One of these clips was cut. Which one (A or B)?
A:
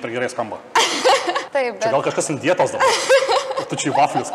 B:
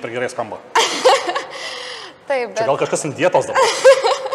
A